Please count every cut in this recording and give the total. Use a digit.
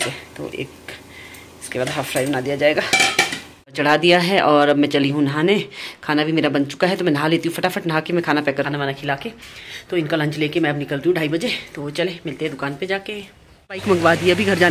3